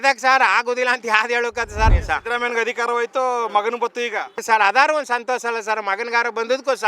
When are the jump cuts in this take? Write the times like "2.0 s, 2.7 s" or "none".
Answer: 1.9 s, 4.3 s